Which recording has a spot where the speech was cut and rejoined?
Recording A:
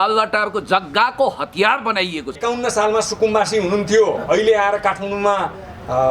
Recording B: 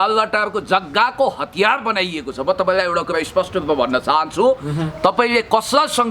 A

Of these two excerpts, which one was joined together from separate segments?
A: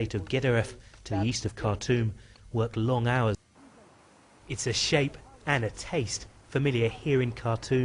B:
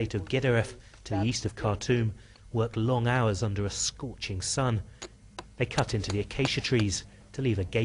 B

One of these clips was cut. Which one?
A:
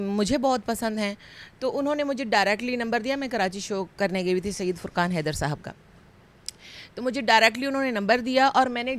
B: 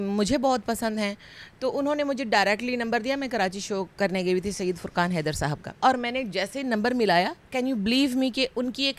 B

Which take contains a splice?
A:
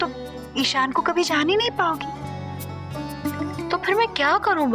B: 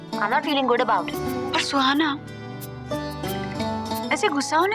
B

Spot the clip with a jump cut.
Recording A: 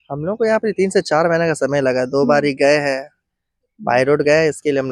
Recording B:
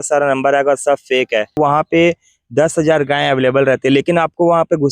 B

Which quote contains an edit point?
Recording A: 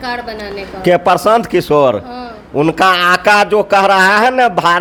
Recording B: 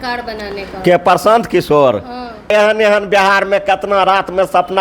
B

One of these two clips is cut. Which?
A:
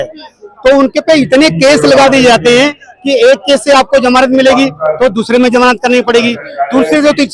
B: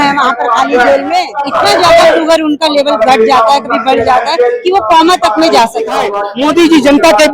B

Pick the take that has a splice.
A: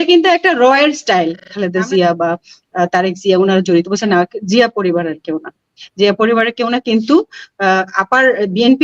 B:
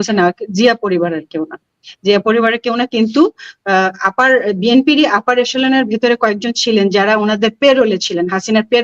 A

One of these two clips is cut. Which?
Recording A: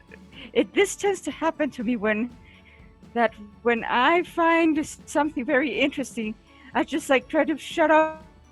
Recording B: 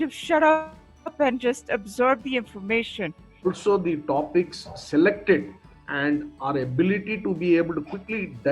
B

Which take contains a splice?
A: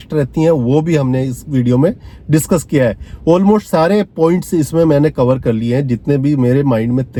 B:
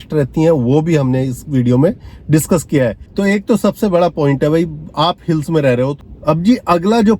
B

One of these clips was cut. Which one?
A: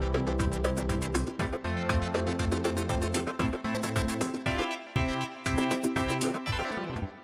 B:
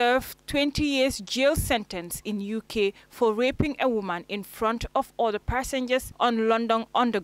B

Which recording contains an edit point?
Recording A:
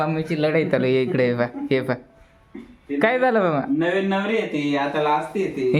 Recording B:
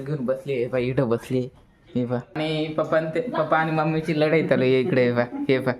B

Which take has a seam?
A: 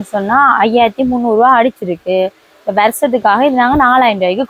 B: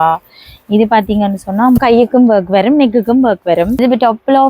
B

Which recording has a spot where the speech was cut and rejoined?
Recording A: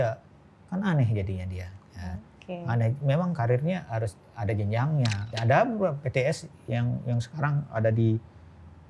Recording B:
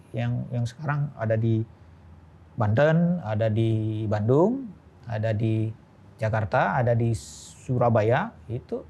A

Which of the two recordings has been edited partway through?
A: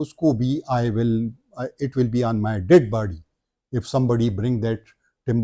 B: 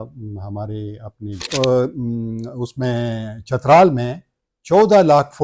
B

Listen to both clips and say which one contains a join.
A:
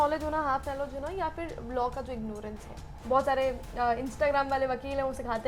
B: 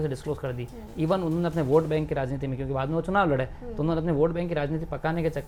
A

